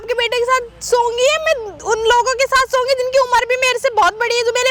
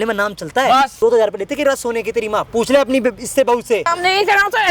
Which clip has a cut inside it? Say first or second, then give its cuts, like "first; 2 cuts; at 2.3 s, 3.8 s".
second; 2 cuts; at 0.9 s, 3.9 s